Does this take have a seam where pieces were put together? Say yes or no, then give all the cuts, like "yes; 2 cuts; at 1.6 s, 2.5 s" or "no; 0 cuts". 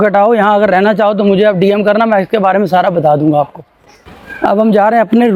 no; 0 cuts